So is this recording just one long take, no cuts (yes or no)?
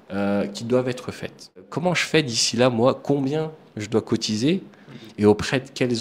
no